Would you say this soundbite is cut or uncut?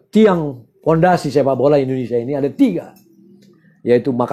uncut